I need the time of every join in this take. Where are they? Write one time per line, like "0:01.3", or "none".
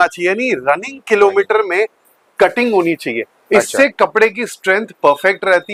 none